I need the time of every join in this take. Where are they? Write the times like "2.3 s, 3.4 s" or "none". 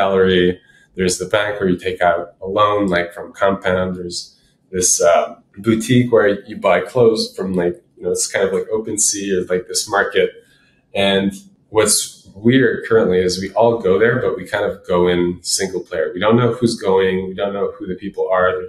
5.4 s